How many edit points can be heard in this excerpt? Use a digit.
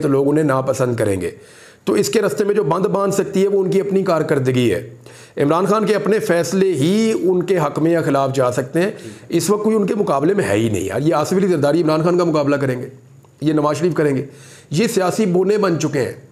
0